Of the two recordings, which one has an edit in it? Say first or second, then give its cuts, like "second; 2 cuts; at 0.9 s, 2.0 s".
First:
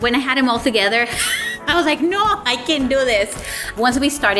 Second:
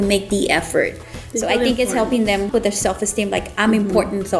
second; 1 cut; at 2.5 s